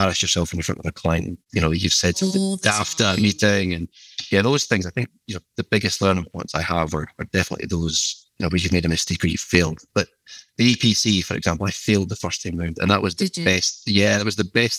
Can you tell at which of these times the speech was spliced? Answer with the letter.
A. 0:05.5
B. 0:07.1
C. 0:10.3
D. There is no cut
D